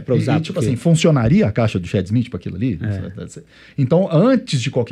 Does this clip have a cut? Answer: no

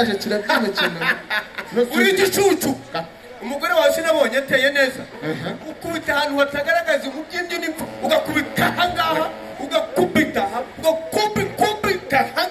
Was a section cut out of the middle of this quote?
no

